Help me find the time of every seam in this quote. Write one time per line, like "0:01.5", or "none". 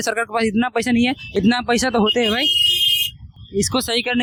none